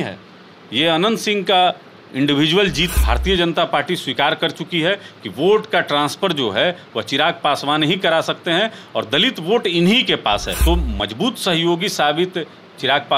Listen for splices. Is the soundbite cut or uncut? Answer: cut